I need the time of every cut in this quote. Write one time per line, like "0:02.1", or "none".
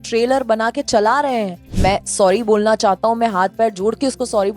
0:01.6